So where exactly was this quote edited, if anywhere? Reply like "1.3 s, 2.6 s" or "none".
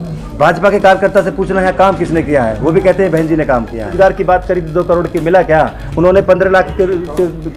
3.9 s